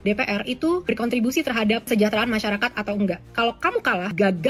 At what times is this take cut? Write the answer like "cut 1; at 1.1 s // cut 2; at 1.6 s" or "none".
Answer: none